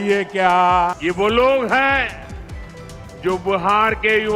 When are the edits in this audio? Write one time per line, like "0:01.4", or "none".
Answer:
0:01.0